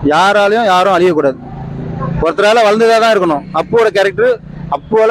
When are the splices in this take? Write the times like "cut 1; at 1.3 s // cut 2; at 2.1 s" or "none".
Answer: none